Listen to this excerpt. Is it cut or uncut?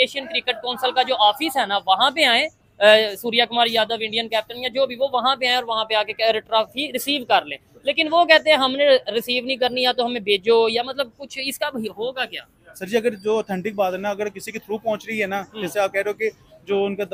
uncut